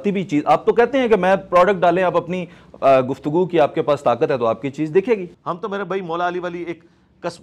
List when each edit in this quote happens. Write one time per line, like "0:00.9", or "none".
0:05.3